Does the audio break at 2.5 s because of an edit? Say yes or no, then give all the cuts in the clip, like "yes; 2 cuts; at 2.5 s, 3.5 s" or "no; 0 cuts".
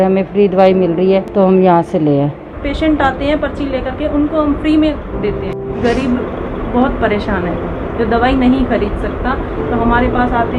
yes; 3 cuts; at 1.3 s, 2.5 s, 5.6 s